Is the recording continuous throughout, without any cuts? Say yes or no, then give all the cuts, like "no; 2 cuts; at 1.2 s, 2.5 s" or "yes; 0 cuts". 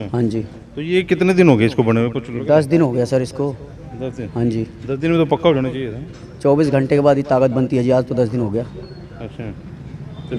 yes; 0 cuts